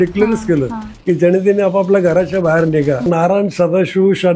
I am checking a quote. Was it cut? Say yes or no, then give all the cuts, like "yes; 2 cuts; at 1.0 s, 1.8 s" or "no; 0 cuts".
yes; 1 cut; at 3.1 s